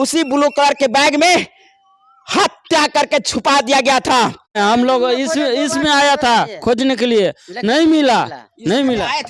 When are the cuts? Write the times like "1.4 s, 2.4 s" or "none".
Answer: 4.6 s